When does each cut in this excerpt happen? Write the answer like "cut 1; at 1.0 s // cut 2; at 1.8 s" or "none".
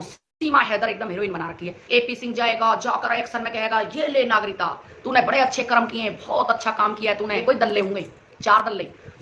cut 1; at 1.8 s // cut 2; at 7.4 s